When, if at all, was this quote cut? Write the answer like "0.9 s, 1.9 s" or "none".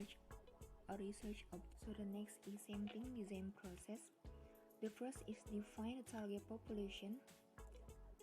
1.7 s